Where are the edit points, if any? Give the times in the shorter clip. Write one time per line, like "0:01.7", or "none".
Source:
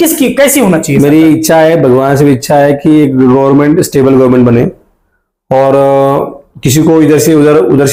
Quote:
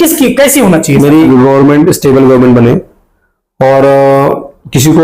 0:01.3